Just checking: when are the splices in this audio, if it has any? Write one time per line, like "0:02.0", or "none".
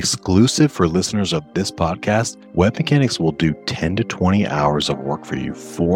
0:02.4